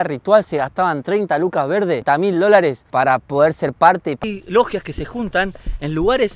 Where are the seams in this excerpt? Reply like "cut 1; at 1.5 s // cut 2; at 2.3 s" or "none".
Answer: cut 1; at 2.0 s // cut 2; at 2.8 s // cut 3; at 4.2 s